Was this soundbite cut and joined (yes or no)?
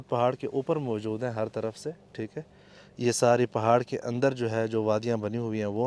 no